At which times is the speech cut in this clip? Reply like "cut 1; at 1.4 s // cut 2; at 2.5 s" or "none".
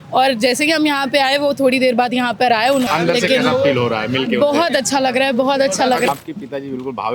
cut 1; at 2.9 s // cut 2; at 6.1 s